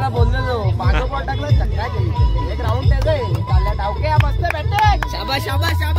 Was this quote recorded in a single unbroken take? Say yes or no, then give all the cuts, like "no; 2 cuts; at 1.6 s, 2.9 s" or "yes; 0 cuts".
yes; 0 cuts